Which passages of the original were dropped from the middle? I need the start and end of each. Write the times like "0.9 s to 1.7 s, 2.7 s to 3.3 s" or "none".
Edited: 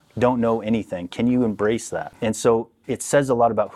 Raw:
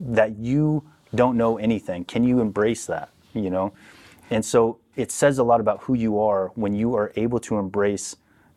3.1 s to 4.2 s